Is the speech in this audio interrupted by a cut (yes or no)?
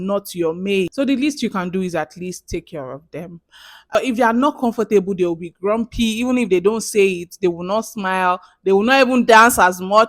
yes